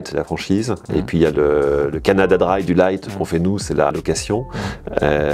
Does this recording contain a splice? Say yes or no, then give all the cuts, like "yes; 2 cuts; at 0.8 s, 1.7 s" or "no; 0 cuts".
yes; 1 cut; at 3.9 s